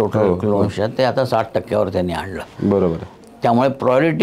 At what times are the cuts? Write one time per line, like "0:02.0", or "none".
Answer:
none